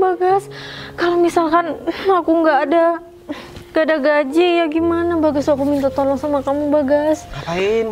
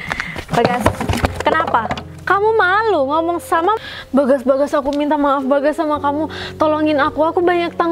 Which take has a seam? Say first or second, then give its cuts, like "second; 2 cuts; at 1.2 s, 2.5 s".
second; 1 cut; at 3.8 s